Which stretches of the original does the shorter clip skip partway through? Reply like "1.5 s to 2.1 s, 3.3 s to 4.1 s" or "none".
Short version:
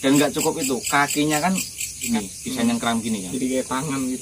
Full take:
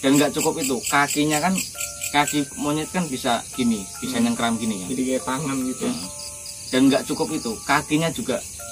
2.1 s to 3.7 s

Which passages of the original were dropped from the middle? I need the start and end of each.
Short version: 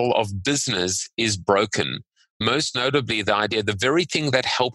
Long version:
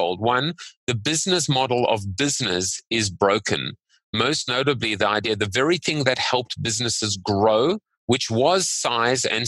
none

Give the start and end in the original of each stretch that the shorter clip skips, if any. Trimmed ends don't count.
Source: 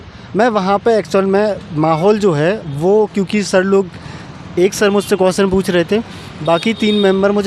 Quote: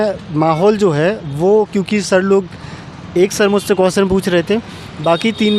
none

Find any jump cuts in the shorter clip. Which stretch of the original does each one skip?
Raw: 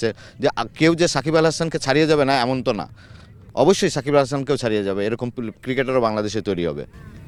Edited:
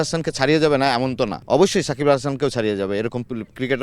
2.8 s to 3.4 s

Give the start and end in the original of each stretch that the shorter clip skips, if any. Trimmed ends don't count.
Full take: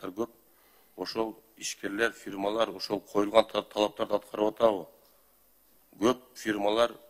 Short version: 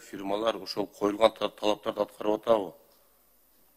none

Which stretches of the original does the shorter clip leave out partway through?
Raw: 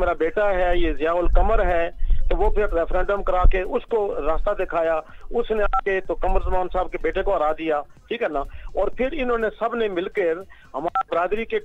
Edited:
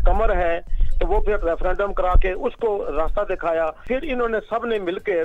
5.1 s to 8.9 s

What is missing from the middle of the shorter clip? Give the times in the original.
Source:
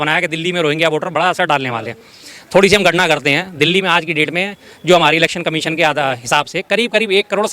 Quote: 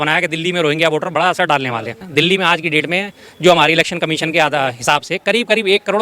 2.0 s to 3.5 s

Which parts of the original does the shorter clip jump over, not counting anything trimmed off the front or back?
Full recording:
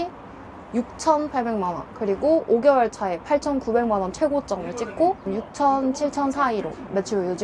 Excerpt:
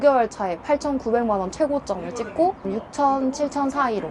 none

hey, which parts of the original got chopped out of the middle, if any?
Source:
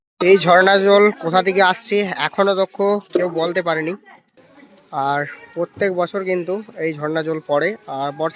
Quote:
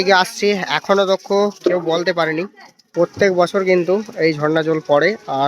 4.3 s to 5.4 s

